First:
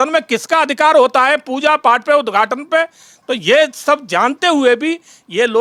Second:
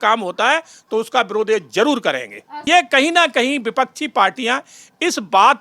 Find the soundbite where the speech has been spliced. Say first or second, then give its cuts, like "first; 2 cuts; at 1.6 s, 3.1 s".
second; 1 cut; at 2.6 s